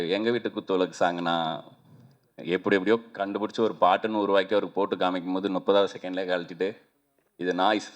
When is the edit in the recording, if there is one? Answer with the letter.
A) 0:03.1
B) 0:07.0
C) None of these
C